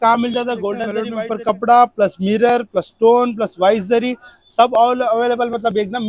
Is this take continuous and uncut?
no; 1 cut; at 1.0 s

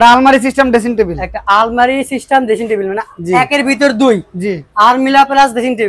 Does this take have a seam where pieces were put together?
no; 0 cuts

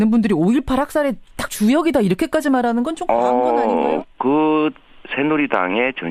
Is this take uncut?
yes; 0 cuts

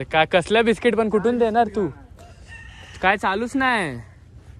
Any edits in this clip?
no; 0 cuts

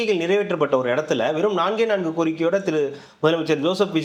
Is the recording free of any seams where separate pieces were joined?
yes; 0 cuts

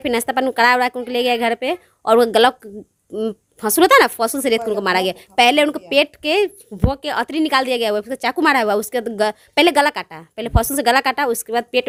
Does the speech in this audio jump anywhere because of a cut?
no; 0 cuts

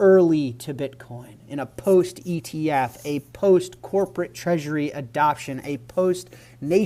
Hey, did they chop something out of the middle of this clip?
no; 0 cuts

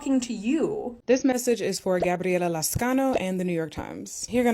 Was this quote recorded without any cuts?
no; 1 cut; at 0.9 s

